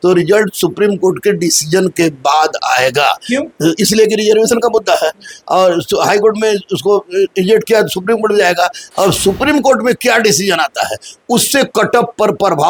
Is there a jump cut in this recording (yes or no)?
no